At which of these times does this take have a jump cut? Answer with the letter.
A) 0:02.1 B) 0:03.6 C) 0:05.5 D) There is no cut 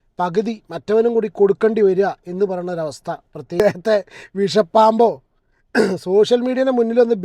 B